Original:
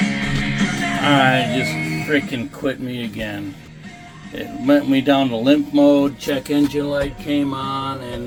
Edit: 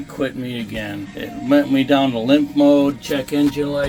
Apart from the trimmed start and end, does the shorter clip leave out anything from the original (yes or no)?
yes